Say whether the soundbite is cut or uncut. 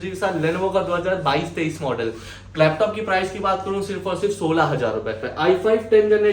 cut